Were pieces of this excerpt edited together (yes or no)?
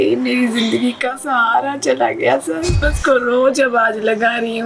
yes